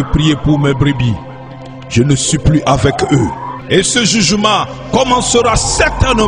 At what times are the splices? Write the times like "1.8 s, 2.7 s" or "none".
3.5 s